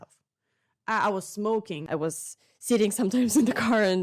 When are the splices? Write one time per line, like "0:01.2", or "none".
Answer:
0:01.8